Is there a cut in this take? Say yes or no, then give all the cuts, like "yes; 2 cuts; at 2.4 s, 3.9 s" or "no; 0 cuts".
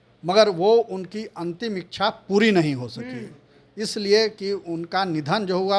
no; 0 cuts